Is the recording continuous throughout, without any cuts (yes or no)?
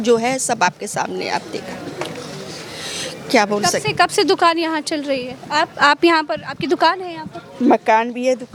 yes